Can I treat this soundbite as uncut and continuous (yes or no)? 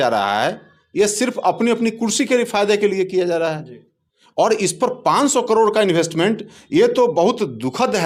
yes